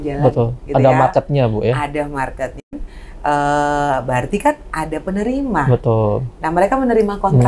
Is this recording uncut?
yes; 0 cuts

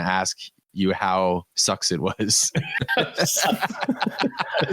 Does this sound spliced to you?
yes; 1 cut; at 1.5 s

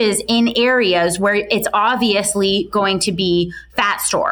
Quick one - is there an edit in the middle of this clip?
no; 0 cuts

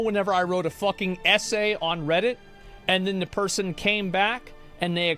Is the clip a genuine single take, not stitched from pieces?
yes; 0 cuts

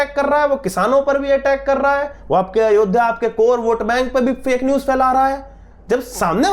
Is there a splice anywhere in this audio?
no; 0 cuts

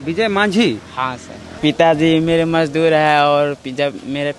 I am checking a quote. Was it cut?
yes; 1 cut; at 1.5 s

